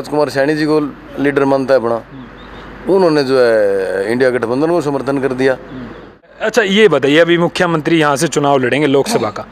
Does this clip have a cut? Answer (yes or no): yes